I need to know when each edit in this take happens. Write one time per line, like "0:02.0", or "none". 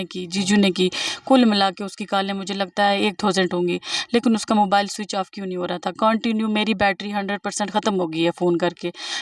none